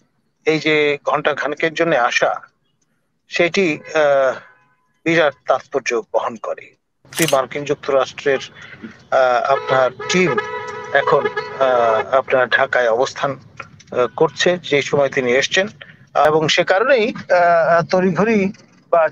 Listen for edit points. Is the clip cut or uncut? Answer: cut